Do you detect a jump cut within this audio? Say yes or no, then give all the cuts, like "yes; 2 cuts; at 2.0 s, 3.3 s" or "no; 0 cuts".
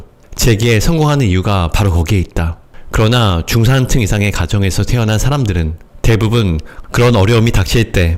no; 0 cuts